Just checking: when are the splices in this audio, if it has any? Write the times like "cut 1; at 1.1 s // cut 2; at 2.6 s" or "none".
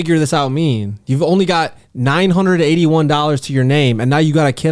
none